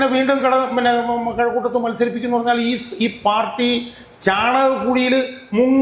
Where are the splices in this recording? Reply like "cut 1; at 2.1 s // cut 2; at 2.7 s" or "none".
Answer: none